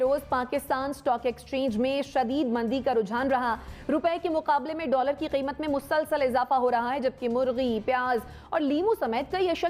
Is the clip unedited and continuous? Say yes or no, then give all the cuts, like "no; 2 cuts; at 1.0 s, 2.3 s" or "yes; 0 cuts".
yes; 0 cuts